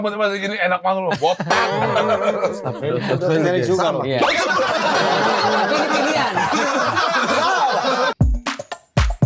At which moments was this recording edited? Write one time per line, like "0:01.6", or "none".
0:08.1